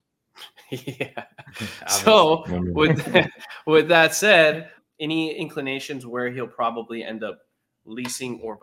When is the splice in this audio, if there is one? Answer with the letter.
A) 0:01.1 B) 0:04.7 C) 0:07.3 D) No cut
B